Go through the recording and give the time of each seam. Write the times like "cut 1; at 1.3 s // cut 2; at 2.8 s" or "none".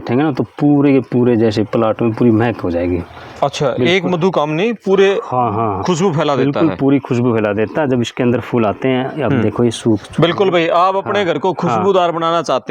none